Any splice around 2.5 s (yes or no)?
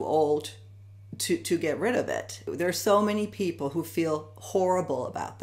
yes